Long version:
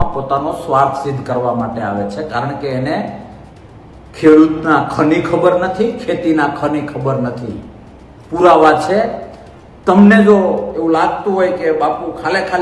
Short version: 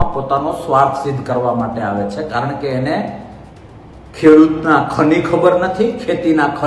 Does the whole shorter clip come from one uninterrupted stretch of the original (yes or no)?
yes